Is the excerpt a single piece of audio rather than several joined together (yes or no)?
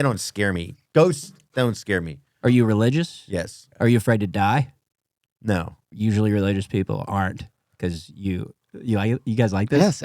no